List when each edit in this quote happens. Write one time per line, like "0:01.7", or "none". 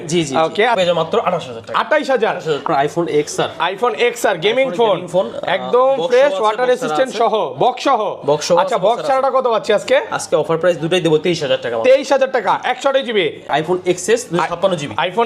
0:00.8
0:02.7
0:13.5